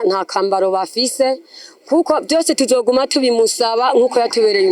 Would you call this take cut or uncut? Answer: uncut